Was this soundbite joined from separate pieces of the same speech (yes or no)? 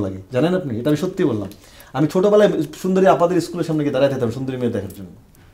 yes